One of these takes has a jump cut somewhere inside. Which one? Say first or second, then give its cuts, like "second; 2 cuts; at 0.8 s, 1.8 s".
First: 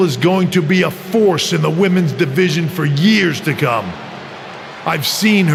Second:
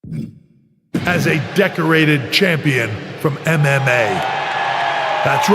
second; 1 cut; at 1.1 s